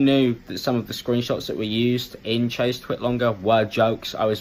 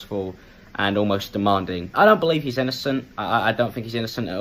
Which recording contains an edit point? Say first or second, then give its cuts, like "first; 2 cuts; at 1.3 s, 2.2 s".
second; 1 cut; at 1.8 s